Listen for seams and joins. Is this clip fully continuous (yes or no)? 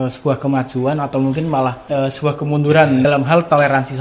no